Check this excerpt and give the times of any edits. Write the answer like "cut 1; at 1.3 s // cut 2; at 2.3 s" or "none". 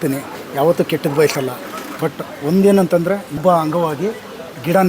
cut 1; at 3.4 s